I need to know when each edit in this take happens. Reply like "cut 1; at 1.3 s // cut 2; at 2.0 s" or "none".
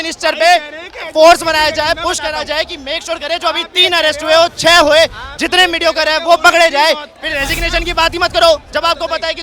cut 1; at 7.1 s